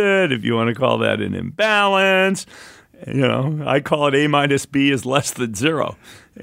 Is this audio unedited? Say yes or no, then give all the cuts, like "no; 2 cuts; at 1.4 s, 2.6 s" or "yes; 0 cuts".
yes; 0 cuts